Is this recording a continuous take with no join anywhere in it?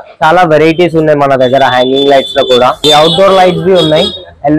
no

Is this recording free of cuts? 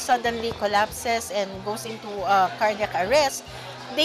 yes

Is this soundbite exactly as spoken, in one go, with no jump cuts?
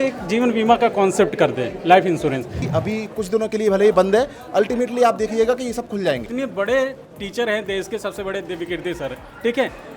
no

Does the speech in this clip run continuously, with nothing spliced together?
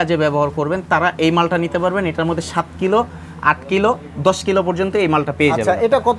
yes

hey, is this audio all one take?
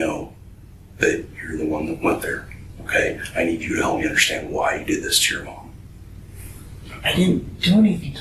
yes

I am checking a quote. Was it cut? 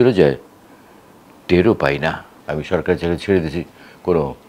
yes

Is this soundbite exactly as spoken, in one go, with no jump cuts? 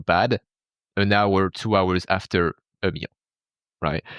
no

